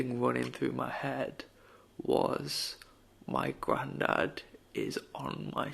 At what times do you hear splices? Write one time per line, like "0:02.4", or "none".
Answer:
none

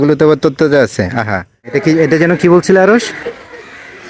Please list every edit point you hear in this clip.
0:01.7

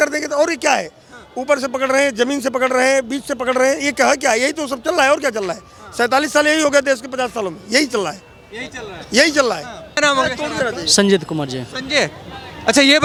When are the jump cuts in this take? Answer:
none

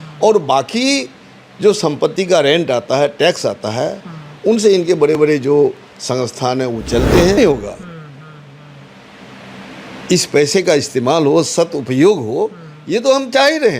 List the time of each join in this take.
0:07.4

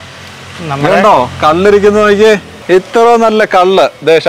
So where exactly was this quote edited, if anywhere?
0:02.5

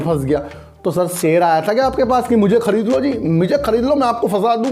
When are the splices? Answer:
none

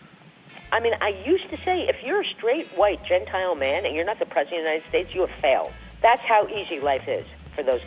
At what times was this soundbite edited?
0:05.8

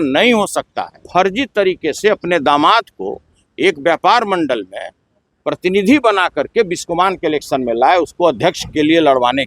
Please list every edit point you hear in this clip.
0:01.0

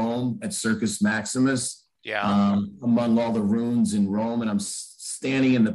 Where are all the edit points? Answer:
none

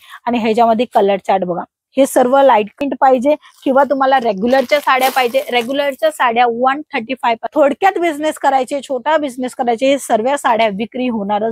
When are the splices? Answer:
0:02.8
0:07.5

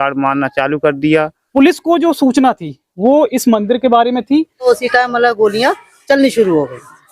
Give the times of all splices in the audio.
0:01.4
0:04.6

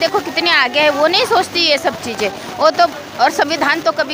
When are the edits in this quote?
none

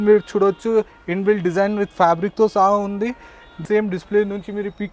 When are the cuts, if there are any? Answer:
0:03.6

